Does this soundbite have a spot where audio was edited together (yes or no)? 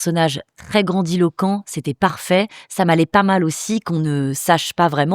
no